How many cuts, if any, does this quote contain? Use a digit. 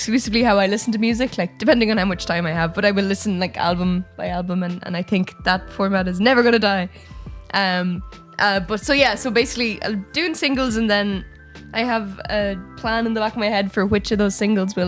0